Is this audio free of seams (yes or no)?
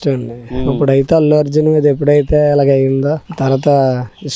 no